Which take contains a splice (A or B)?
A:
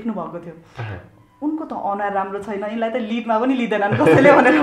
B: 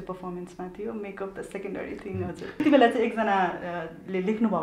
B